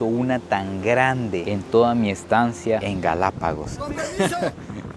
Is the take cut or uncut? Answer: cut